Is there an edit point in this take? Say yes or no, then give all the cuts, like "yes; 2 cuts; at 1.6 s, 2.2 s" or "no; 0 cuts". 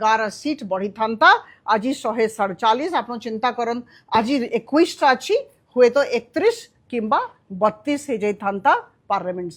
no; 0 cuts